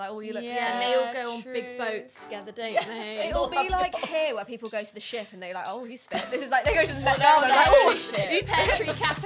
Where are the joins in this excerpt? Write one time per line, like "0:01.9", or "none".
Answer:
none